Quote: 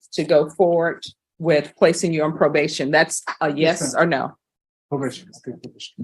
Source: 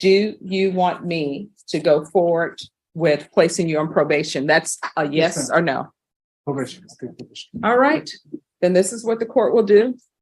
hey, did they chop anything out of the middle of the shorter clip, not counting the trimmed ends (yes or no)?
no